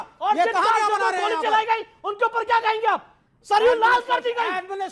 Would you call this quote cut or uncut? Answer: uncut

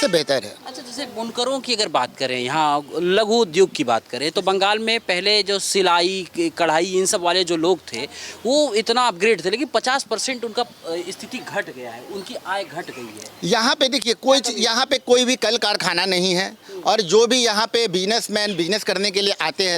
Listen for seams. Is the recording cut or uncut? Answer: uncut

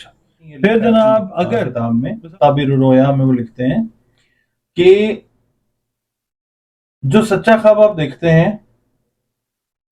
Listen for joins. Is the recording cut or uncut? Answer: cut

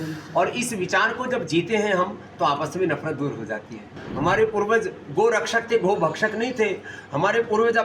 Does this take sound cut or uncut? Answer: cut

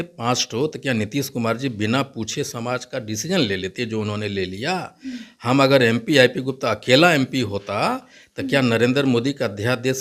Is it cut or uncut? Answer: uncut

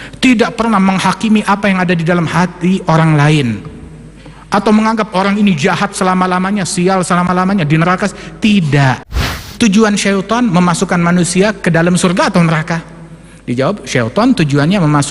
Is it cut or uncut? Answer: cut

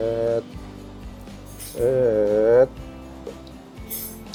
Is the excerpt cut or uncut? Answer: uncut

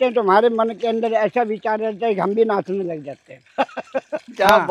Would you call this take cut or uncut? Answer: uncut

